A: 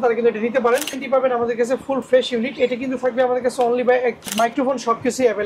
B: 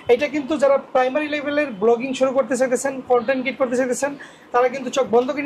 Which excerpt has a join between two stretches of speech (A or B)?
A